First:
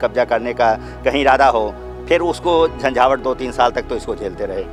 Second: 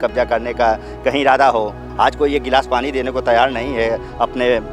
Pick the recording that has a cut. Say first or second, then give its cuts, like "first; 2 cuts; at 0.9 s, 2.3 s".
second; 1 cut; at 1.8 s